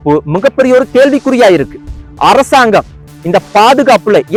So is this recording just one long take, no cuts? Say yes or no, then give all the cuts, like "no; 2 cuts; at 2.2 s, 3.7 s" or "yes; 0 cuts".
yes; 0 cuts